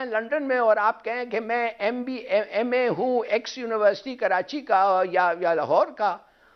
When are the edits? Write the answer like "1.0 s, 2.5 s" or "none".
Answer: none